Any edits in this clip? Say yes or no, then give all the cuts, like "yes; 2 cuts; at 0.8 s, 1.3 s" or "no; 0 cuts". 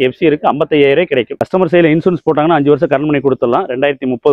yes; 1 cut; at 1.4 s